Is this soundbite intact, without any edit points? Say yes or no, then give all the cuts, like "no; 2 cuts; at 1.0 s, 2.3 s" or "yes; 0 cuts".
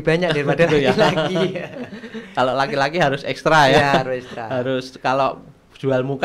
yes; 0 cuts